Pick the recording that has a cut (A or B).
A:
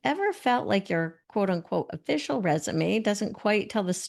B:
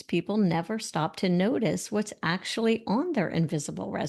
A